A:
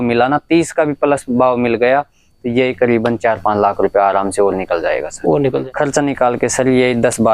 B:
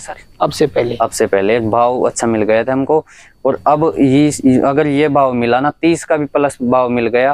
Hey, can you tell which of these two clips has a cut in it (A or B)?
A